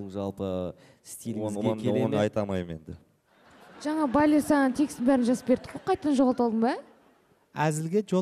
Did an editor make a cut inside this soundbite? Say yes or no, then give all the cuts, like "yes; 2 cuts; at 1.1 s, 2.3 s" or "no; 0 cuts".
no; 0 cuts